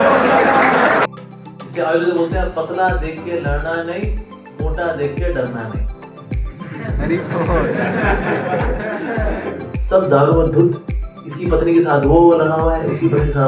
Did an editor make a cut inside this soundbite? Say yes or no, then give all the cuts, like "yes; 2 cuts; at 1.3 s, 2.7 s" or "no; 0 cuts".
yes; 2 cuts; at 1.0 s, 9.7 s